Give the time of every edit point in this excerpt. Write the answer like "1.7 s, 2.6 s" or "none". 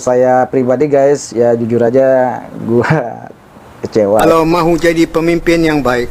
4.2 s